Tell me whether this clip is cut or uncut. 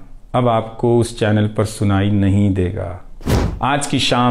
cut